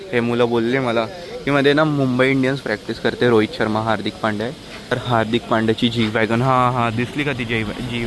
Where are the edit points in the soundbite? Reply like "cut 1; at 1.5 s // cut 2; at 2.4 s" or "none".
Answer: cut 1; at 4.9 s